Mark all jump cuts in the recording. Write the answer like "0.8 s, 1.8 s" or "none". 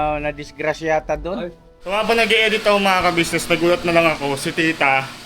1.9 s